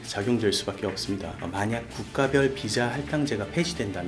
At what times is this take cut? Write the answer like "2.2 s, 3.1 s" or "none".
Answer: 1.4 s